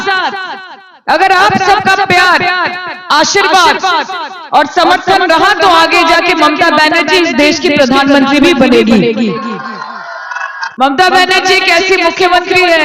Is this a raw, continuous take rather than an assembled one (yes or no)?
no